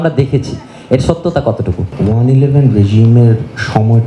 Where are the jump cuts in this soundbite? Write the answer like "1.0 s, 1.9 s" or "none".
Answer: 1.9 s